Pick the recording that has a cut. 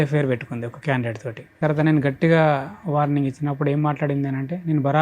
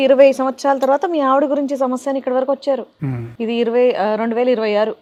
first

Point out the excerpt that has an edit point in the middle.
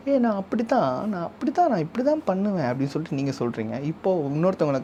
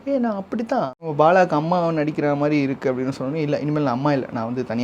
second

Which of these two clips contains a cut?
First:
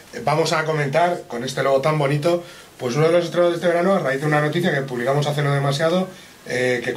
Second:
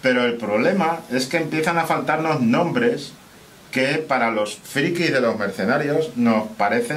first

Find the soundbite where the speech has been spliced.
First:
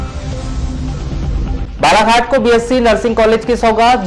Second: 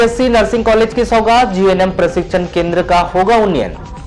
first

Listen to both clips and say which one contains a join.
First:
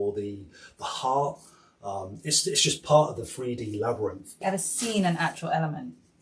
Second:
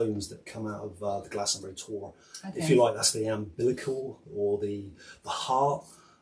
first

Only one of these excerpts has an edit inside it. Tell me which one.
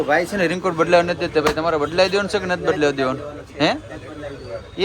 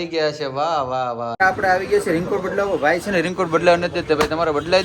second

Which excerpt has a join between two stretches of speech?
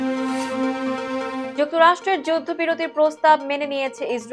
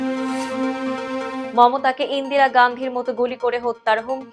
second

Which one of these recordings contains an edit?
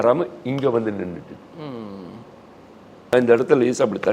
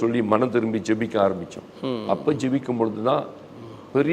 first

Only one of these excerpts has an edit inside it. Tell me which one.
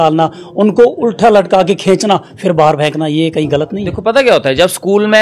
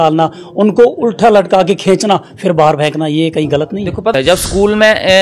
second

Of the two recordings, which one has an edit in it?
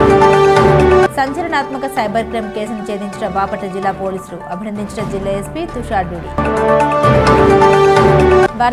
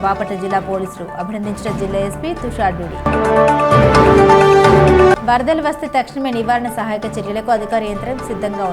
first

